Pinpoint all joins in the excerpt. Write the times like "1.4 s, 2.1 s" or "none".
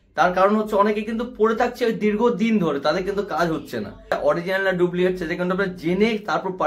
4.1 s